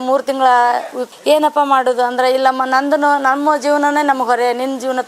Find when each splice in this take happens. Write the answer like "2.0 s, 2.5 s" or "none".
1.0 s